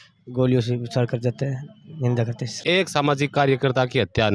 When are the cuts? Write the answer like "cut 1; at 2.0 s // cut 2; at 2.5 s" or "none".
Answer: cut 1; at 2.5 s